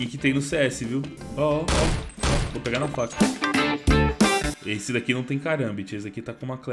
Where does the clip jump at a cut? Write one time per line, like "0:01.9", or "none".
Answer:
0:03.1